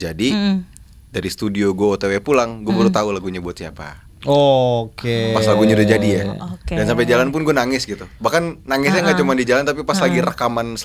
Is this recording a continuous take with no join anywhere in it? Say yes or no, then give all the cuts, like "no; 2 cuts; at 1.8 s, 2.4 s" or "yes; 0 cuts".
yes; 0 cuts